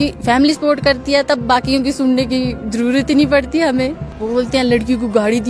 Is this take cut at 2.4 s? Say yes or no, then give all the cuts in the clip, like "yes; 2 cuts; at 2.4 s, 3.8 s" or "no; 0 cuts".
no; 1 cut; at 4.1 s